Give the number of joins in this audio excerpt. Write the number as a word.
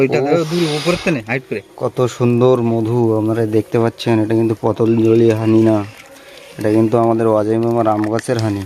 zero